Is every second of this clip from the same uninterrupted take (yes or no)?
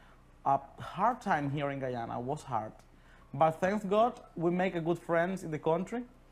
yes